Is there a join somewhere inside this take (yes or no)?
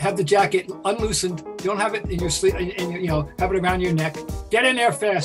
yes